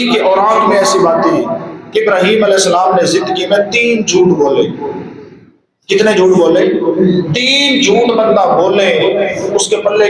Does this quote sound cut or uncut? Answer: uncut